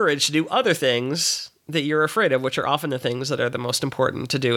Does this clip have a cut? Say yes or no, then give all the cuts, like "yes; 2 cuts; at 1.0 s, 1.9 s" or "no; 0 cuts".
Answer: no; 0 cuts